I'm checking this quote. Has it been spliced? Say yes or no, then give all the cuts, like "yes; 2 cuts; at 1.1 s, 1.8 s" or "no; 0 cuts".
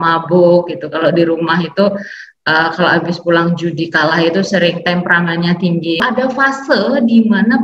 yes; 1 cut; at 6.0 s